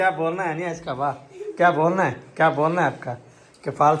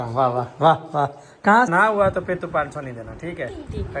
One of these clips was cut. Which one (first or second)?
second